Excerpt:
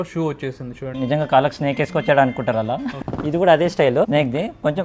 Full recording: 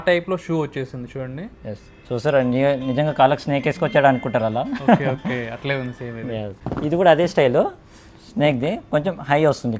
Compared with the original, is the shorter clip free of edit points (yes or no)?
no